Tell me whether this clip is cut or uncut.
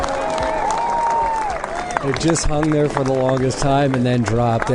cut